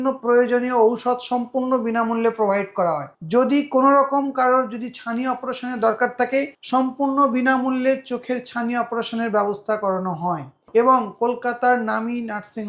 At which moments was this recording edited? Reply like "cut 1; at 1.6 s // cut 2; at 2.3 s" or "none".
cut 1; at 3.1 s // cut 2; at 6.6 s // cut 3; at 10.5 s